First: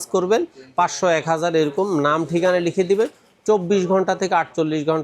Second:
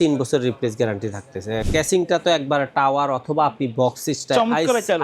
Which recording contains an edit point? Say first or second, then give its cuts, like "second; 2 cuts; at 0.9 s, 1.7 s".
second; 1 cut; at 1.7 s